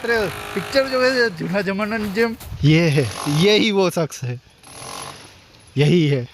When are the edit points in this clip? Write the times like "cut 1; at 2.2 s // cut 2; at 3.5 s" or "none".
cut 1; at 2.5 s